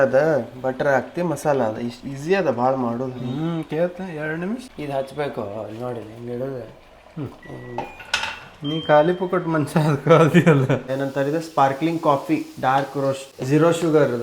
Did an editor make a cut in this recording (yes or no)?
yes